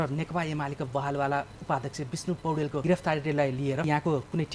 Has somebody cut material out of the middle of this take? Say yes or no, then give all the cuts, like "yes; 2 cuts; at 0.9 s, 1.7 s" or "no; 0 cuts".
yes; 2 cuts; at 2.8 s, 3.9 s